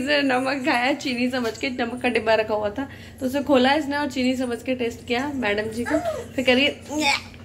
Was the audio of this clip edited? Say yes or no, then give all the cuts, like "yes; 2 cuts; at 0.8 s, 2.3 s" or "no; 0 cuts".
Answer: no; 0 cuts